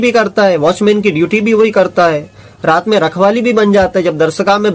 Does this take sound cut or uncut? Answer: uncut